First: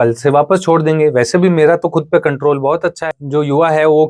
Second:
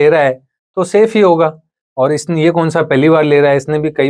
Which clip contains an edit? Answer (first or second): first